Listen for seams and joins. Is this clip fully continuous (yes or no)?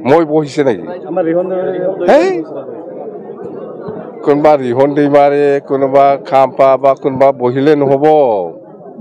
yes